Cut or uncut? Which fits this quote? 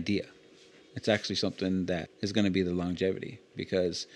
cut